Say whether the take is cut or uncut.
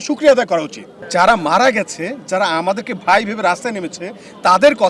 cut